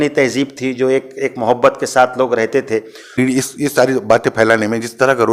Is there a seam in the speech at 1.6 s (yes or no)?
no